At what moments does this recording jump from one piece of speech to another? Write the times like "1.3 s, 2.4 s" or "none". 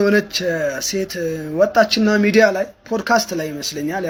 none